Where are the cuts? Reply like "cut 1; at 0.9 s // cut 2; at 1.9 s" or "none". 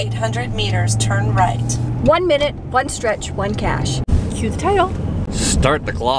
cut 1; at 4.0 s // cut 2; at 5.3 s